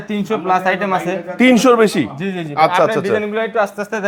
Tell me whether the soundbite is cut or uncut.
uncut